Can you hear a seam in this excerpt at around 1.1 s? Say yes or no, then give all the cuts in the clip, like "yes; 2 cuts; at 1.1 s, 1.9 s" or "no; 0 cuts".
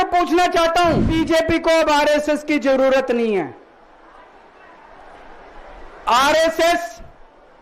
yes; 1 cut; at 1.1 s